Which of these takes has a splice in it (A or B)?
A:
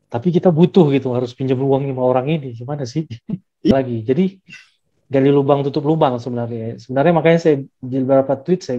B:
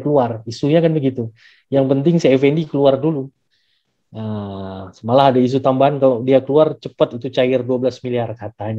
A